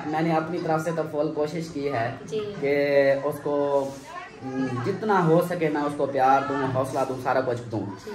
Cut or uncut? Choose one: uncut